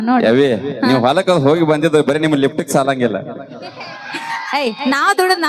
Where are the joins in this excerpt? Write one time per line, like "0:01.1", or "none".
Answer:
none